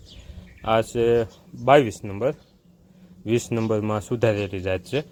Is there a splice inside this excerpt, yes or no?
no